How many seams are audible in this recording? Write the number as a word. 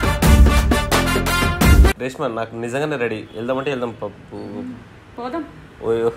one